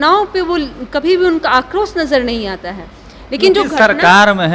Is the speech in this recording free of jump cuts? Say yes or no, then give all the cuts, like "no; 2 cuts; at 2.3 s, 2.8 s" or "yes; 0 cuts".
yes; 0 cuts